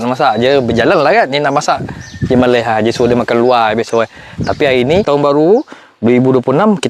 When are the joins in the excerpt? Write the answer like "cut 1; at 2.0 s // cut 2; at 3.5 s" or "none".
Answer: cut 1; at 5.1 s